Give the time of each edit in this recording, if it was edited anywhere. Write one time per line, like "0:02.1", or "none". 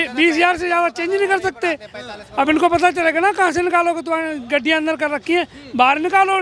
none

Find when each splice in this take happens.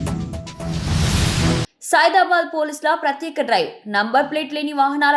0:01.6

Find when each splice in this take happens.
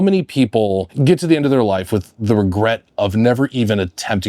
0:00.9

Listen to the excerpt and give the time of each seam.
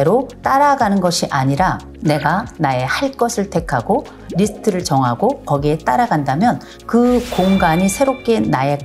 0:02.5
0:04.2

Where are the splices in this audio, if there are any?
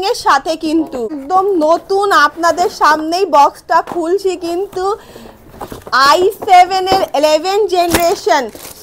0:01.2

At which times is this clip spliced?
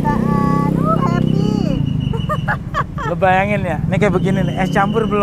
none

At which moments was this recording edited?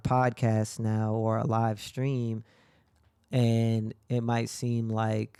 none

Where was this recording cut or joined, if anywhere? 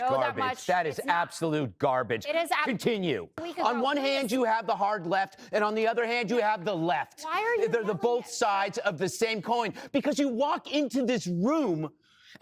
0:03.5

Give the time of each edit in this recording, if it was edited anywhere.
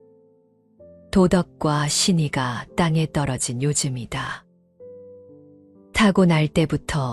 none

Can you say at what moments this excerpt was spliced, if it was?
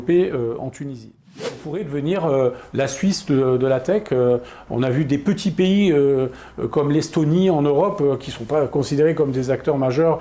0:01.2

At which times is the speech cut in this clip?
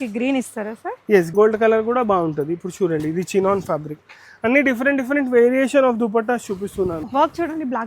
0:01.3
0:07.1

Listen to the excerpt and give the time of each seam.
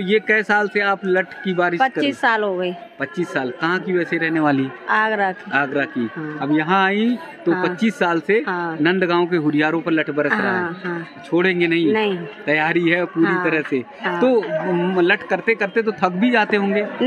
none

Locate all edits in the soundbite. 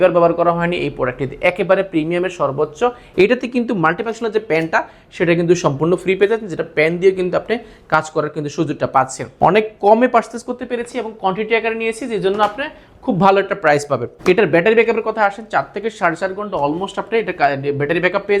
0:03.0
0:09.2
0:14.1

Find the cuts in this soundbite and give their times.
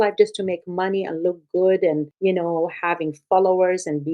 0:02.1

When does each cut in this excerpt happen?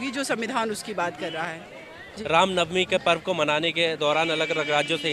none

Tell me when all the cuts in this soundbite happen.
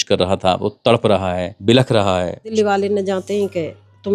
0:01.5
0:02.5

